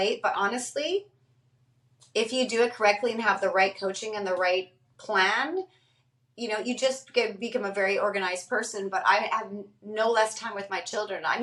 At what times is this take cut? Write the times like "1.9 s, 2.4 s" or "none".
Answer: none